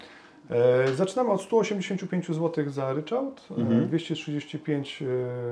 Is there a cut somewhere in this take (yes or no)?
no